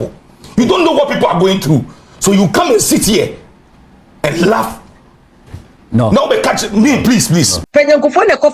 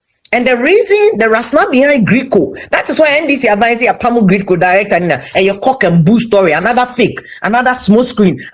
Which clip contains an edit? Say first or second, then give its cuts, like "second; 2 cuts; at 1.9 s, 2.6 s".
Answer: first; 1 cut; at 7.5 s